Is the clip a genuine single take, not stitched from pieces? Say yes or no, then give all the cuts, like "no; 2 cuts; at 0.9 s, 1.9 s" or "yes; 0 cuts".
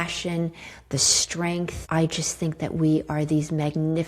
no; 1 cut; at 1.8 s